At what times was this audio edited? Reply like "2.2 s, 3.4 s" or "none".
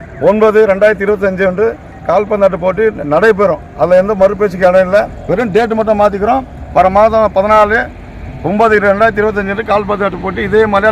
5.2 s